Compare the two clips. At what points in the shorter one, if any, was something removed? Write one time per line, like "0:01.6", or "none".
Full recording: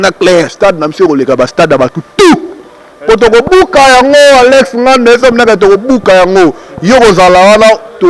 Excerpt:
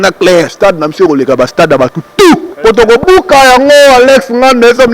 0:02.5

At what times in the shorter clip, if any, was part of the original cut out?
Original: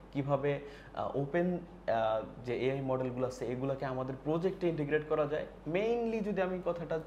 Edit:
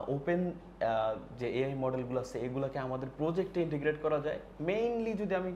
none

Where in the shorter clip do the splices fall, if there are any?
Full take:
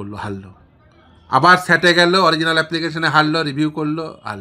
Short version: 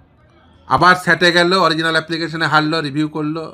none

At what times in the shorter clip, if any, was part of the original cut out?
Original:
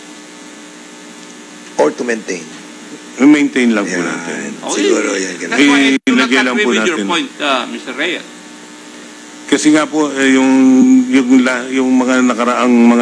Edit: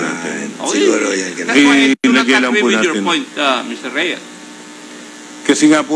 none

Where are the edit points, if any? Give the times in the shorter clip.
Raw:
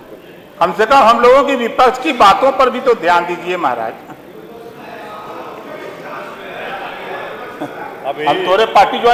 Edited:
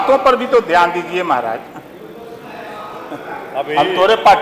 0:03.1

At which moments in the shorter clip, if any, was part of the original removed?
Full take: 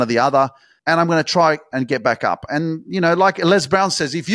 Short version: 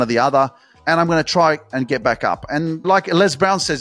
0:02.9

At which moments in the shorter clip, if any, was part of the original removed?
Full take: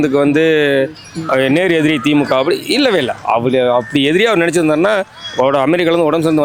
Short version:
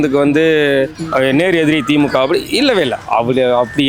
0:01.0

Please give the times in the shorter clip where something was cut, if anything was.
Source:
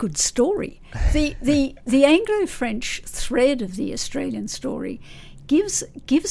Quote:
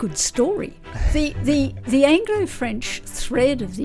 none

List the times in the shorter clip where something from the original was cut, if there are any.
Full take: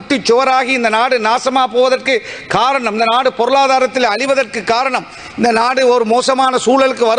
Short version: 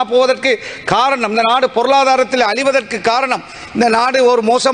none

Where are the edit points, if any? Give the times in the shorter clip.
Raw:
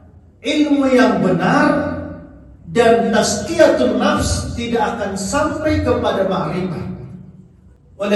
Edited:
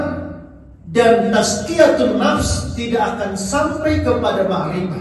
none

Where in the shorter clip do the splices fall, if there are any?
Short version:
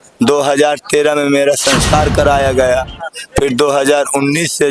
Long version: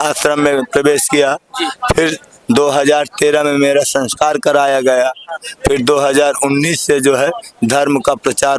none

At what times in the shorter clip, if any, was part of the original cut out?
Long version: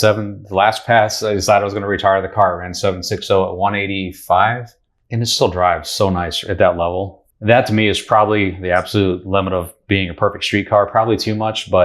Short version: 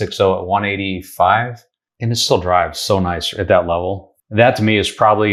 none

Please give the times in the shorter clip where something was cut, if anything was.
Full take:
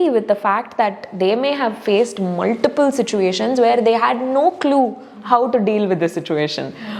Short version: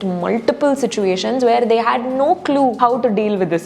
0:02.8

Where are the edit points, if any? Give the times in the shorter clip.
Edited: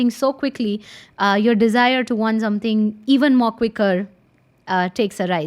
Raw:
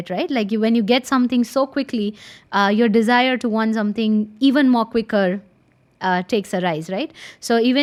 none

